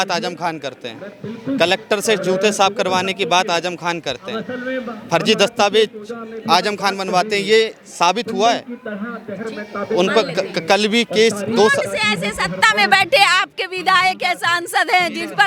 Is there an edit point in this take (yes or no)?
no